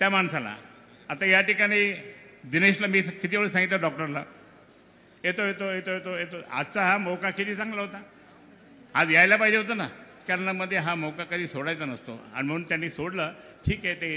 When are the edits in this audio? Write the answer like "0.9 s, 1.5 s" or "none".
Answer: 10.2 s